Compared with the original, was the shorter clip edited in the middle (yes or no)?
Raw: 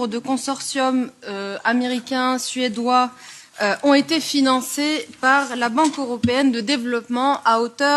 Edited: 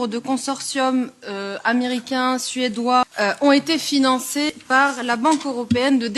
yes